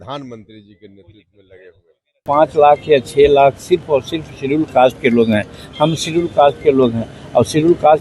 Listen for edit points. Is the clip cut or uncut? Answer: cut